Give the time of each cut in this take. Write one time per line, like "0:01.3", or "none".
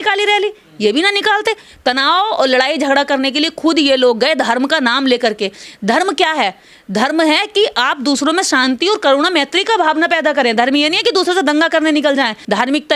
none

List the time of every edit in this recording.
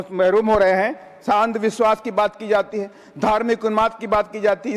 0:01.3

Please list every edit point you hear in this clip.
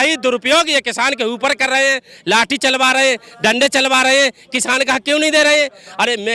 none

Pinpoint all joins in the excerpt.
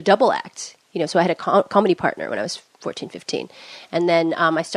0:03.0

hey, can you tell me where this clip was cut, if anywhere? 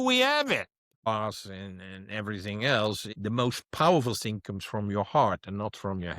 0:01.1
0:03.1

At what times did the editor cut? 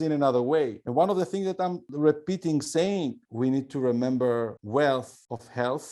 0:01.9

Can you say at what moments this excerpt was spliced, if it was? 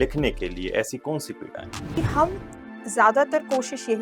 0:01.8

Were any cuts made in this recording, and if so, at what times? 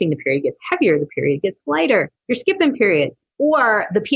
0:02.2
0:03.2

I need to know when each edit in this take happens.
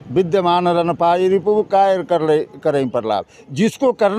none

